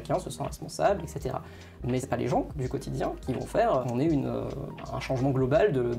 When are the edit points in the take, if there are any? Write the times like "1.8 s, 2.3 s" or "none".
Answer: 2.0 s, 3.8 s, 4.7 s